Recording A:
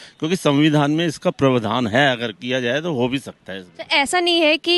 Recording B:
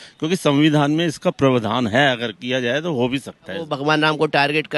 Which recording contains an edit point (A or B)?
B